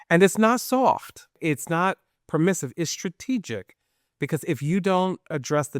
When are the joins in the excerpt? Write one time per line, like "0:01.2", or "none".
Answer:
0:01.4